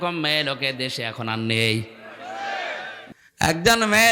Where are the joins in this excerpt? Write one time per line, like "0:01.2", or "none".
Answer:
0:03.0

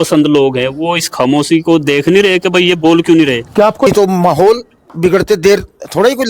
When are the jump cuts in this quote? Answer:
0:03.9

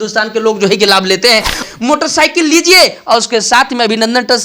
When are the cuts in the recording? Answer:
0:01.6

